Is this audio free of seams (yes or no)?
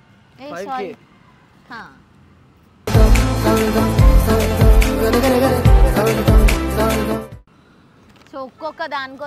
yes